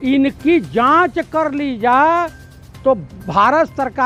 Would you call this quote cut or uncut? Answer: uncut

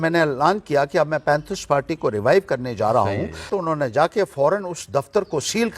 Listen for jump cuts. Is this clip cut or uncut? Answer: cut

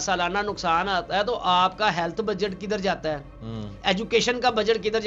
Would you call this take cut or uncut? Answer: uncut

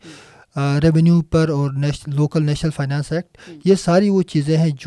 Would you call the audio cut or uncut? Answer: uncut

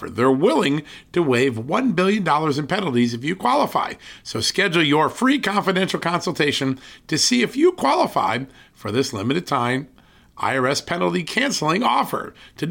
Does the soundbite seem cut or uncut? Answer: uncut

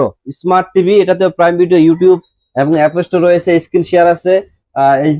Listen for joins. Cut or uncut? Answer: uncut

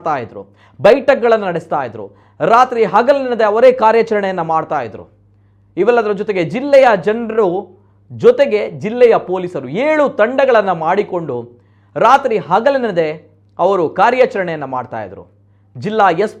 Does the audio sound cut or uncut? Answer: uncut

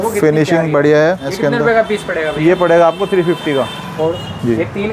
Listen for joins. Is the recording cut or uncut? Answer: cut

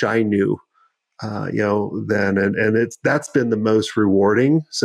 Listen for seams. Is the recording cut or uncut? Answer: uncut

